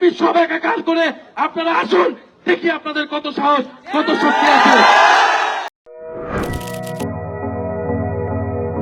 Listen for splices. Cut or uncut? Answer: uncut